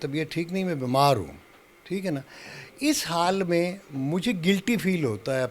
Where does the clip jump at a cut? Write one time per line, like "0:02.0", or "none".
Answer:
none